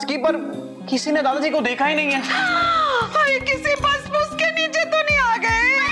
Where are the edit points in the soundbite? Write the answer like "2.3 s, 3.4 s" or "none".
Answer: 2.3 s